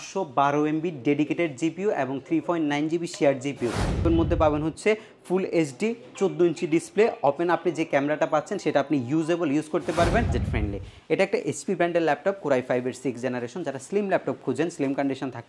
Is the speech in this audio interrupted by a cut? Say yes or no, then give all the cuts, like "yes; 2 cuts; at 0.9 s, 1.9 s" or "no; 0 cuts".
yes; 2 cuts; at 4.0 s, 10.4 s